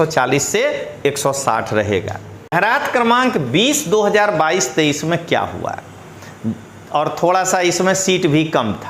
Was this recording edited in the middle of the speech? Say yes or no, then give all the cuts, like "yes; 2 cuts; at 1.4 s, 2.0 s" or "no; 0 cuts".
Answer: yes; 1 cut; at 2.5 s